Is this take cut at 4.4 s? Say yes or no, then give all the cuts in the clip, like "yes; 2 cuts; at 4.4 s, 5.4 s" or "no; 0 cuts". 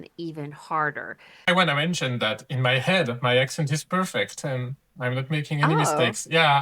no; 1 cut; at 1.5 s